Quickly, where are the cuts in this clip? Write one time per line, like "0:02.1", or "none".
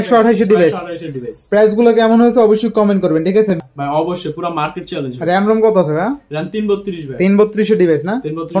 0:03.6